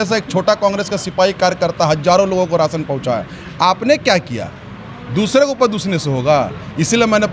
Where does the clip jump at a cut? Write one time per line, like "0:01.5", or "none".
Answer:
none